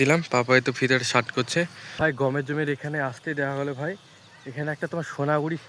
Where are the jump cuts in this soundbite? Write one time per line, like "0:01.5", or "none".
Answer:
0:02.0